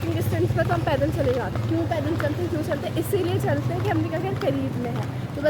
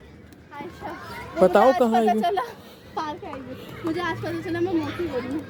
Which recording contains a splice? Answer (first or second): first